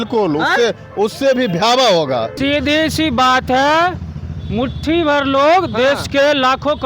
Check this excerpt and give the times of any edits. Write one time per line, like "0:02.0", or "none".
0:02.4